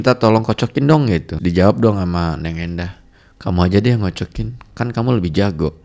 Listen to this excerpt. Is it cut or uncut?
cut